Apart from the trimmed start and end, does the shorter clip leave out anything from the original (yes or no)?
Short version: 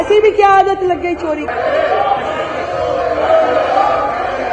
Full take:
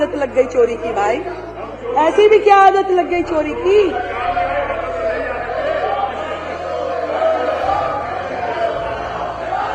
yes